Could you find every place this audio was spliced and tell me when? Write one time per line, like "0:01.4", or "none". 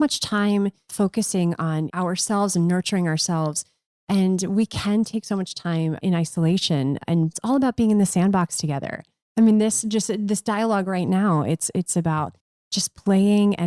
0:00.9
0:01.9
0:06.0
0:07.4